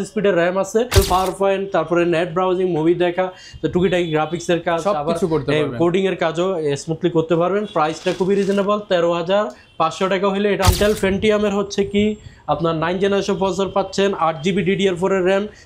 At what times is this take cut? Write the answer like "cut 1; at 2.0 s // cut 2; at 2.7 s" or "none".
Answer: cut 1; at 0.9 s // cut 2; at 10.7 s